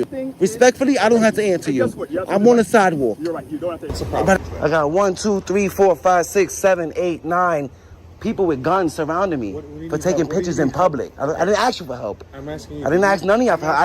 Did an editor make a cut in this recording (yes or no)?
yes